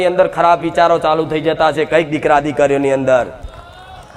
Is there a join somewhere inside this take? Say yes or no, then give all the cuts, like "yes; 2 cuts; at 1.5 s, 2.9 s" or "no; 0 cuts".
no; 0 cuts